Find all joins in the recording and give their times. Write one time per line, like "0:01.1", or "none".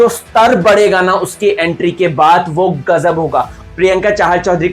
0:03.6

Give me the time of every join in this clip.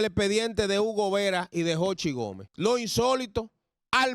0:02.4

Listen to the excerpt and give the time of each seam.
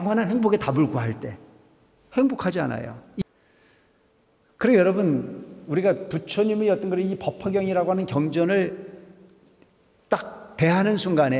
0:03.2

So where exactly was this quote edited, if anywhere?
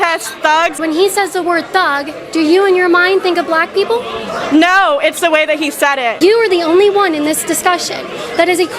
0:00.7
0:06.2

